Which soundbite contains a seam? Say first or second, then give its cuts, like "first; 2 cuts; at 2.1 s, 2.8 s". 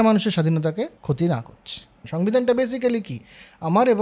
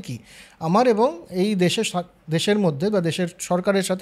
first; 2 cuts; at 1.0 s, 2.0 s